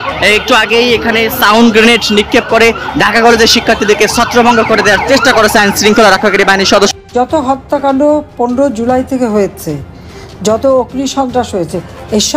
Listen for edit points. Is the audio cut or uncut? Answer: cut